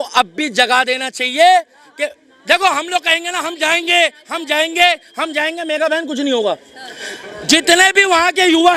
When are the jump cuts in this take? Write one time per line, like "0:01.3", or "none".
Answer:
none